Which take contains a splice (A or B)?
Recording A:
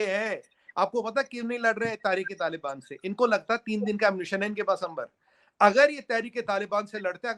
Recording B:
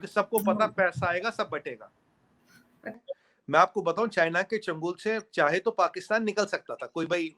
B